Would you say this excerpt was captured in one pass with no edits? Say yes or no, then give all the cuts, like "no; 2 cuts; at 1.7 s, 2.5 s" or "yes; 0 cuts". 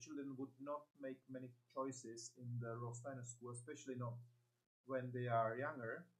yes; 0 cuts